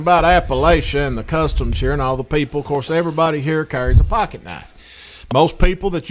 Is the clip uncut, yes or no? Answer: yes